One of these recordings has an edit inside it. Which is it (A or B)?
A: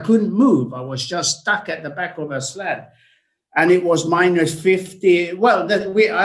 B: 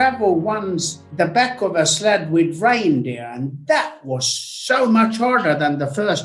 B